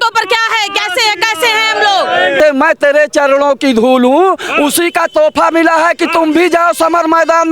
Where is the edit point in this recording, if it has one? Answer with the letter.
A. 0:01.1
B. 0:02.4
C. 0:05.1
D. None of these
B